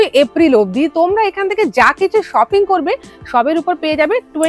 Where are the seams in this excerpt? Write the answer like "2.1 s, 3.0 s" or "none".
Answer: none

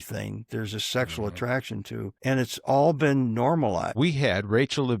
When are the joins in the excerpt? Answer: 2.1 s, 3.9 s

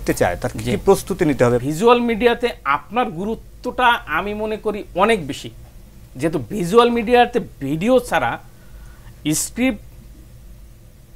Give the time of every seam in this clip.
1.6 s

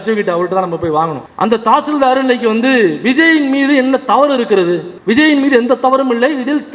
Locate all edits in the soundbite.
none

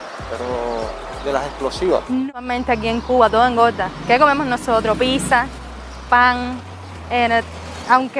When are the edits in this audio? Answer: 2.2 s

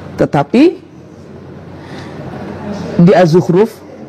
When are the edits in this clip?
none

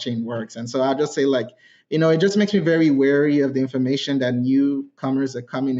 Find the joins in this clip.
none

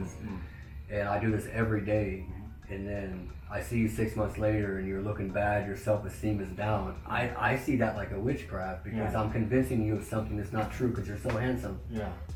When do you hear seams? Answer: none

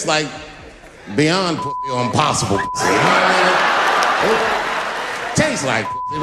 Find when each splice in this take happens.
none

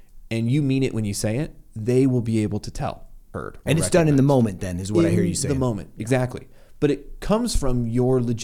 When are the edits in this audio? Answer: 3.2 s

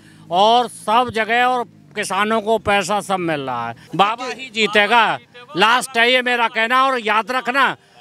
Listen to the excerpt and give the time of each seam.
3.8 s

